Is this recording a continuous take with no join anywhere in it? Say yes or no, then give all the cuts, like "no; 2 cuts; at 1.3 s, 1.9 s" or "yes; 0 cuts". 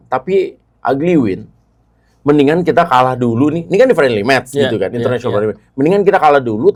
yes; 0 cuts